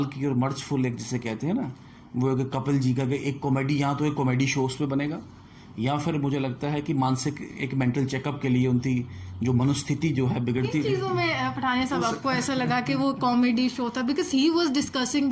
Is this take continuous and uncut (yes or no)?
yes